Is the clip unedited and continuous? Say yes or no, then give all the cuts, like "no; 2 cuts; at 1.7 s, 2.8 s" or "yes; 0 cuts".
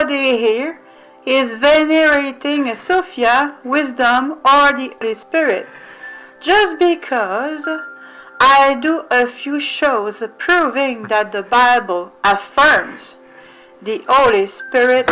yes; 0 cuts